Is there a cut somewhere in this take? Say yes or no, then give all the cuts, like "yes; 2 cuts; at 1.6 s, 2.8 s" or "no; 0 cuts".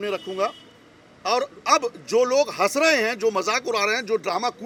no; 0 cuts